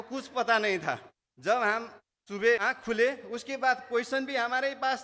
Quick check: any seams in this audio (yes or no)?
yes